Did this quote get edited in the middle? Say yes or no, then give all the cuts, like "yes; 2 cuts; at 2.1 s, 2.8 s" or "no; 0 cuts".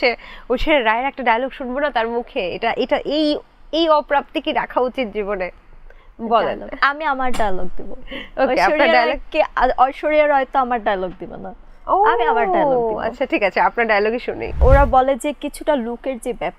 yes; 1 cut; at 14.6 s